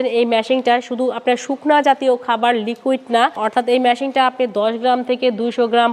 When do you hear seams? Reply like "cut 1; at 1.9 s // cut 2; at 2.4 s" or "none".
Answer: cut 1; at 3.4 s